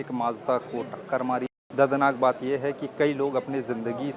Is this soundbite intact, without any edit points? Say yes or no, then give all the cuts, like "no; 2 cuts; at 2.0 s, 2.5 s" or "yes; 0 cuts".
no; 1 cut; at 1.5 s